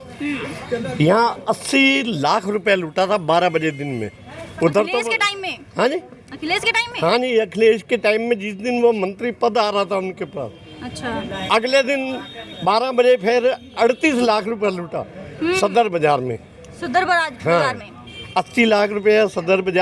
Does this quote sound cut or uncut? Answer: uncut